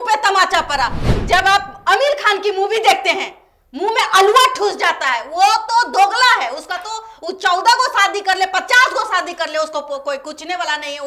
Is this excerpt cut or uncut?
cut